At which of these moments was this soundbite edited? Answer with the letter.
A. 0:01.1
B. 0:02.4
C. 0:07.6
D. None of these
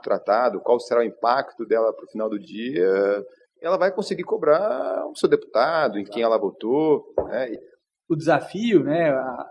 C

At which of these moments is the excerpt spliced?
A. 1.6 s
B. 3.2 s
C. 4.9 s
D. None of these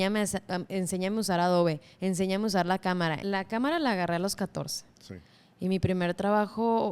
B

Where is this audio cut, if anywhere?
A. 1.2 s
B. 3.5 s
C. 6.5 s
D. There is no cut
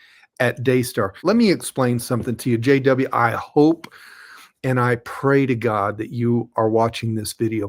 A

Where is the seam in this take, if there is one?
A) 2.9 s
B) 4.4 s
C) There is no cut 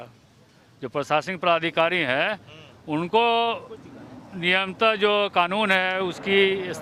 C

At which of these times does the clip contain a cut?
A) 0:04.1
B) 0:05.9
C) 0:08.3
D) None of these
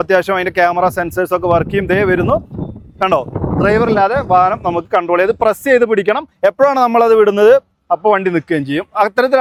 D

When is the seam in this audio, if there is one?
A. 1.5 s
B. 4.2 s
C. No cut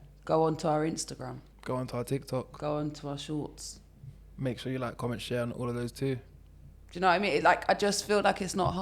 A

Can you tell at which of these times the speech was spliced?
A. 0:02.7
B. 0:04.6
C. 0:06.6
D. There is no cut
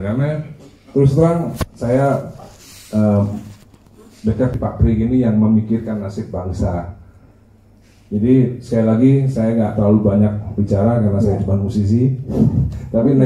B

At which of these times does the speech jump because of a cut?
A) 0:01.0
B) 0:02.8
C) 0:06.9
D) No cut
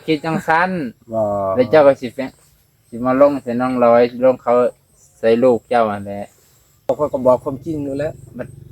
C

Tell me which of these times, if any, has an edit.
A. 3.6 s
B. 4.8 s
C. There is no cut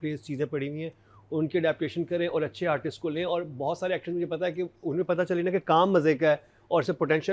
C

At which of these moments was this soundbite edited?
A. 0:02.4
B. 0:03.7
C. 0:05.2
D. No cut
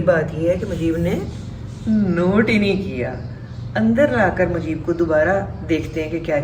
D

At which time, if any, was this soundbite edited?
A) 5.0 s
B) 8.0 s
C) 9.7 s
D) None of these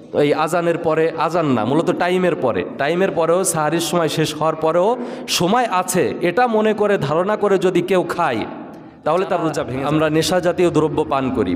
C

